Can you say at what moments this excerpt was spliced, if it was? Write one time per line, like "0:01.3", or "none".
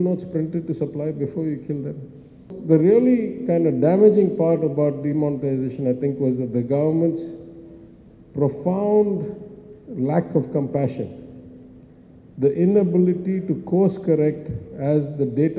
0:02.5